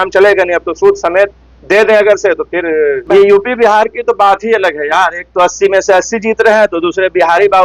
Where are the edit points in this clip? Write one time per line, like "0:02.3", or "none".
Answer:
0:03.0